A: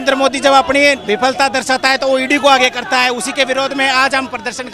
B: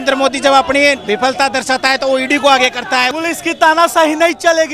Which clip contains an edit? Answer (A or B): B